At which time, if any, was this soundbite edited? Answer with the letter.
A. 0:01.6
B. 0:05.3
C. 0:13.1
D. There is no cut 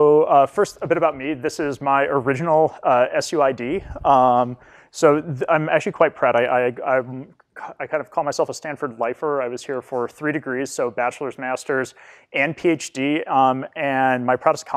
B